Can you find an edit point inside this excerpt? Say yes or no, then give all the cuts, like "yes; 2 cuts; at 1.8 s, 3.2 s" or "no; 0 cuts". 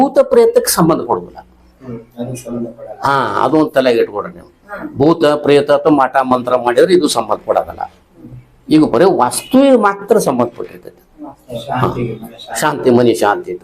no; 0 cuts